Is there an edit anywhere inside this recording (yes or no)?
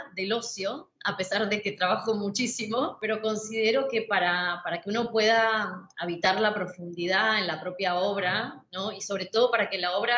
yes